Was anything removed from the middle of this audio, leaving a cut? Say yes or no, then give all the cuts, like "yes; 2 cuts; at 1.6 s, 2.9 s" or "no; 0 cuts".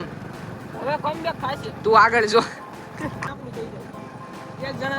yes; 1 cut; at 3.2 s